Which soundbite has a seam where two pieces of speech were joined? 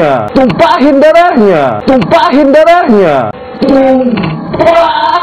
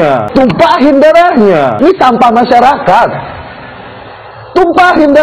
second; 1 cut; at 1.7 s

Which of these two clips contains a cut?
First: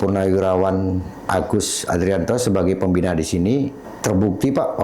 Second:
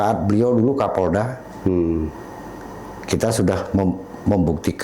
first; 1 cut; at 3.9 s

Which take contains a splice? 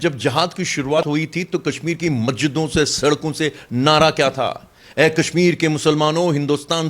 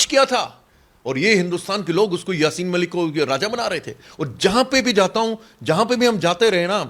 first; 1 cut; at 1.0 s

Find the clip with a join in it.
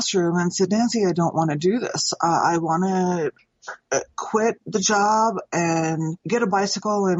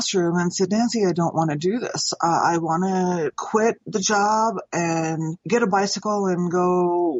second; 1 cut; at 3.4 s

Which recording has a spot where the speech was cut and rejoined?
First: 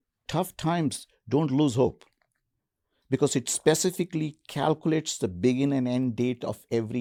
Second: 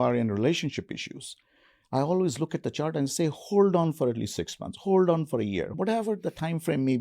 second; 1 cut; at 5.7 s

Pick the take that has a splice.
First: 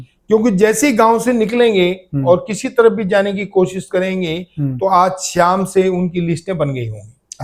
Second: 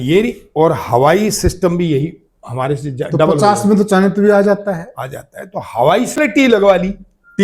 second; 1 cut; at 6.2 s

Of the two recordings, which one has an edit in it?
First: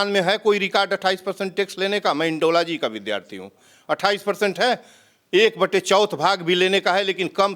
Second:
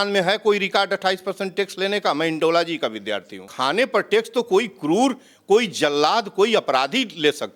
second; 1 cut; at 3.5 s

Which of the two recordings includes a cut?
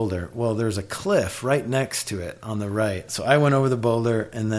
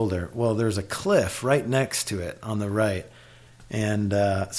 first; 1 cut; at 3.1 s

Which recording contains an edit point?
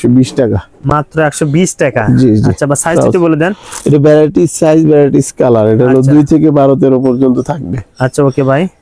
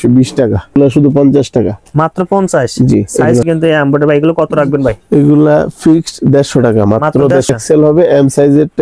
second; 3 cuts; at 0.8 s, 3.5 s, 7.5 s

